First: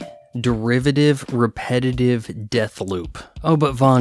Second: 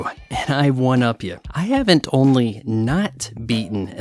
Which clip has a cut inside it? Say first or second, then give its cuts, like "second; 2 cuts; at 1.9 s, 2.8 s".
second; 1 cut; at 1.5 s